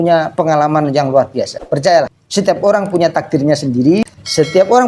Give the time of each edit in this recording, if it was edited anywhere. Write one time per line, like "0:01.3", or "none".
0:01.6
0:02.2
0:04.0